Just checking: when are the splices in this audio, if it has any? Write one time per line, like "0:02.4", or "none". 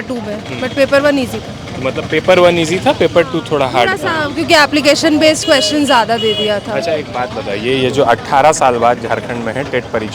none